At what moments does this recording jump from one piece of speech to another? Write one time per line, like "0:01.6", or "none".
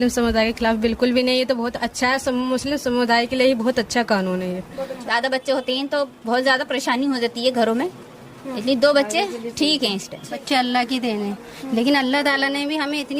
0:04.9
0:10.4